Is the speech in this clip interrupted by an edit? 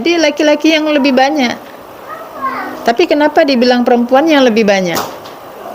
no; 0 cuts

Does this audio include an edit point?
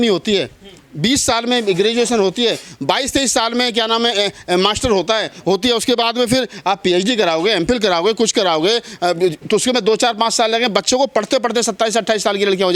no; 0 cuts

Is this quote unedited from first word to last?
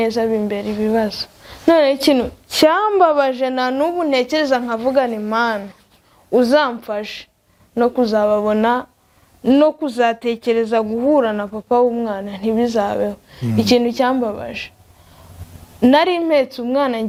yes; 0 cuts

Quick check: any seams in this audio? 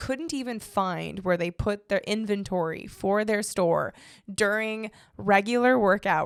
no; 0 cuts

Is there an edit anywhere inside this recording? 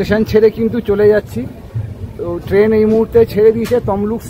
no; 0 cuts

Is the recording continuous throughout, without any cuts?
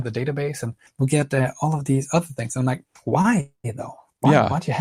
yes; 0 cuts

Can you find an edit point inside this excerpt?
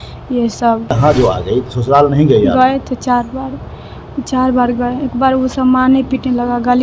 yes; 1 cut; at 0.9 s

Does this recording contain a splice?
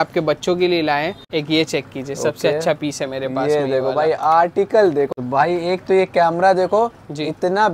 yes; 2 cuts; at 1.3 s, 5.1 s

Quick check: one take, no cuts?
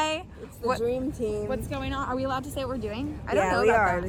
yes; 0 cuts

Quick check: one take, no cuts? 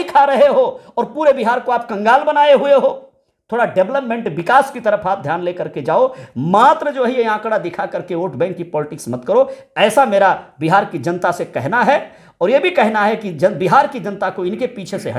yes; 0 cuts

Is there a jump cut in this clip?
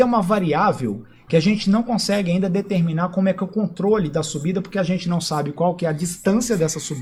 no; 0 cuts

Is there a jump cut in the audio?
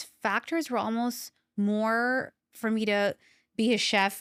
no; 0 cuts

